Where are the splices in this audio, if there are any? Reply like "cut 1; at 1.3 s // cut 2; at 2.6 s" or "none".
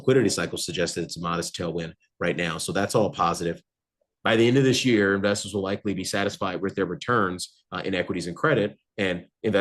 cut 1; at 3.7 s